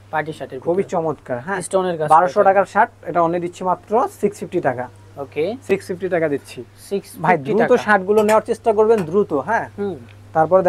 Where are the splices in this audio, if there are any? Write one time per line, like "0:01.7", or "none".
none